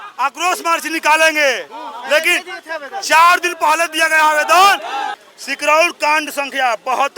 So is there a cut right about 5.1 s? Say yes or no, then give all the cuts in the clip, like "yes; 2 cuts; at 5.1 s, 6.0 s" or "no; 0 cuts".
yes; 1 cut; at 5.1 s